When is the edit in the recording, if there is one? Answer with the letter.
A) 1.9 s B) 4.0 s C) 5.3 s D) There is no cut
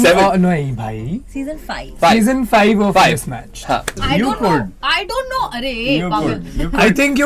B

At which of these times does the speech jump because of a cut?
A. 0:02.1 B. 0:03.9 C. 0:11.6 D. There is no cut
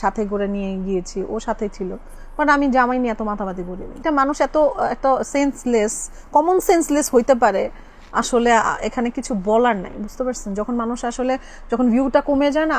B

